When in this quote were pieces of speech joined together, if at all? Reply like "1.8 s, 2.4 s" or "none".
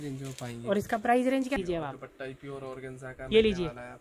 1.6 s

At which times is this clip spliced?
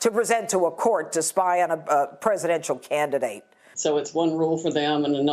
3.7 s

